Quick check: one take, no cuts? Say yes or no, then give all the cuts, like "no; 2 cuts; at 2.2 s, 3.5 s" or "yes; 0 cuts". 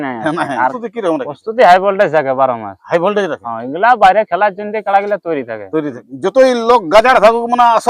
no; 2 cuts; at 0.8 s, 6.0 s